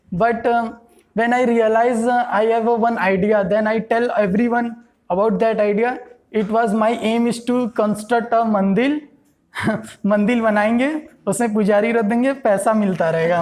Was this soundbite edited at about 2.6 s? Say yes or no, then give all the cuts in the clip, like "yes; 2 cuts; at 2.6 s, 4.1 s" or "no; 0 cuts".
no; 0 cuts